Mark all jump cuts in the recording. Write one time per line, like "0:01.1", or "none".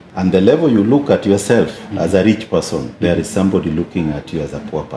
none